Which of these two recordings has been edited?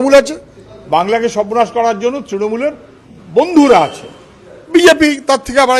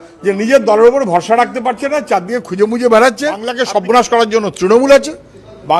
second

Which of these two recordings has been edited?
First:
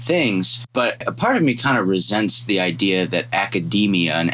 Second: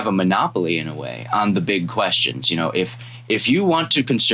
first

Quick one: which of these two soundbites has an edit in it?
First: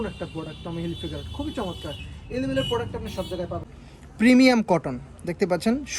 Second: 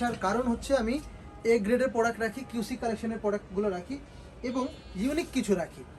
first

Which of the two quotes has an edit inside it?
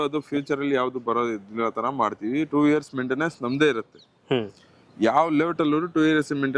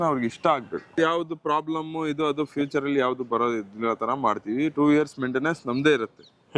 second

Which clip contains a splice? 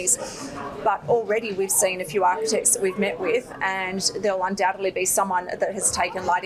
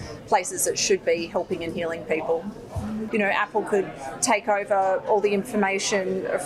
second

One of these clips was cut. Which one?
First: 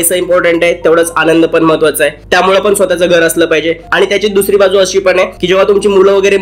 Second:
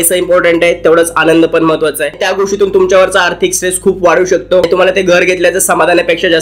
second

